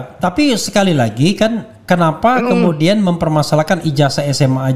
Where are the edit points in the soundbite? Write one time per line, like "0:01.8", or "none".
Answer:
none